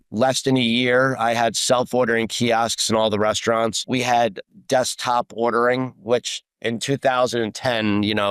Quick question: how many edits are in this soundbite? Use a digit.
1